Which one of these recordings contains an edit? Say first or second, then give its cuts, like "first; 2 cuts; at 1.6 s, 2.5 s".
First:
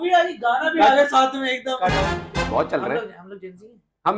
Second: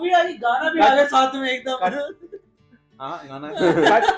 first; 1 cut; at 2.3 s